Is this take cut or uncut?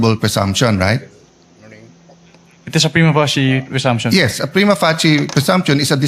cut